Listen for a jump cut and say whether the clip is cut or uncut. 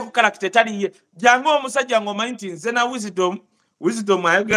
uncut